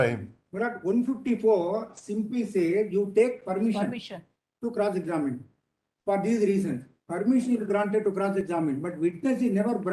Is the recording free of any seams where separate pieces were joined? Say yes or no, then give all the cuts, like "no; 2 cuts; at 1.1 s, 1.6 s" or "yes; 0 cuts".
yes; 0 cuts